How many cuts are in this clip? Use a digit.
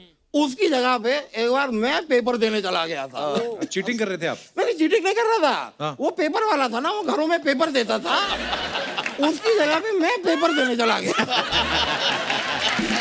0